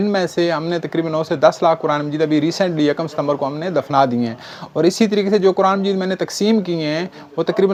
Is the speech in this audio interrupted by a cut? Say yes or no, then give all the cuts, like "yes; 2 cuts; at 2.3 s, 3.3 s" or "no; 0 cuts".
no; 0 cuts